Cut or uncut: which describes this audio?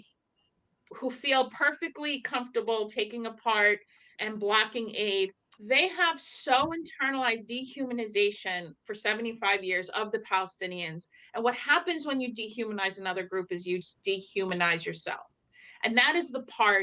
cut